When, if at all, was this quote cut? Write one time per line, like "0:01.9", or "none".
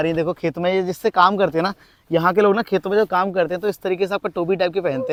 none